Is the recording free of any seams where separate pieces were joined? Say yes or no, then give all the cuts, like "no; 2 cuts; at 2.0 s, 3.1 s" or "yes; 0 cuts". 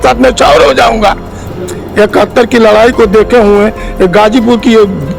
no; 1 cut; at 1.5 s